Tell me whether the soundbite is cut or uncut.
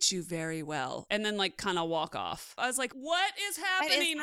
cut